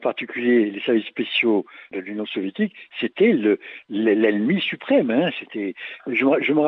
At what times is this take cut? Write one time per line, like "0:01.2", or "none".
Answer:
0:01.8